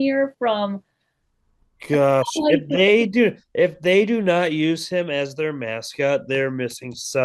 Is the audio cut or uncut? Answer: uncut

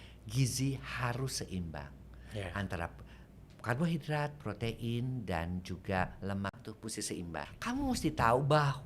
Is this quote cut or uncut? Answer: cut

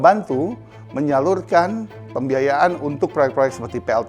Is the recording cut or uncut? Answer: uncut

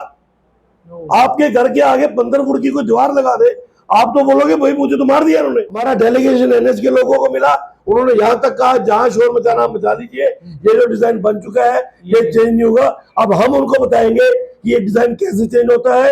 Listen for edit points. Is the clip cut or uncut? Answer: cut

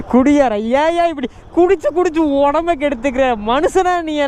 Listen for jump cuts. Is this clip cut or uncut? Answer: uncut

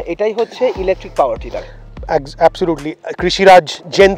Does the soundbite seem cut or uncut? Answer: uncut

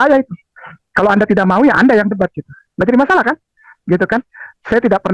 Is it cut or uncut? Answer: uncut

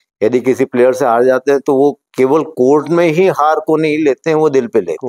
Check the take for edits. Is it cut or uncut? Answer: uncut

